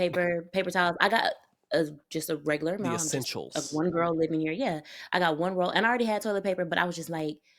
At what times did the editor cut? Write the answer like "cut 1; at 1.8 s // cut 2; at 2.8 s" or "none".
none